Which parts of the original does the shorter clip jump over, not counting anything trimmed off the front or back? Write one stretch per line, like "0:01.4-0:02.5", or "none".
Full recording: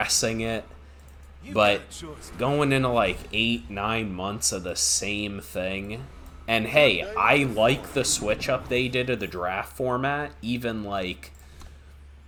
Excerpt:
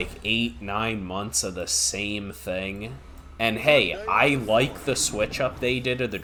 none